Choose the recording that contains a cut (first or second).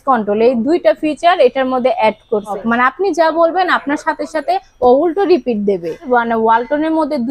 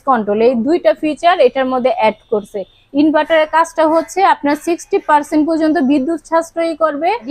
first